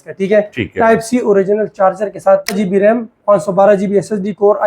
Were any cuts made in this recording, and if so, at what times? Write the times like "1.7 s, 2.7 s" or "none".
2.5 s